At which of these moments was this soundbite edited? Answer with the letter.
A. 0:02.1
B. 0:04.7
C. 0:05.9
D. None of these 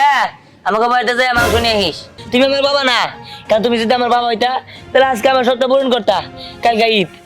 A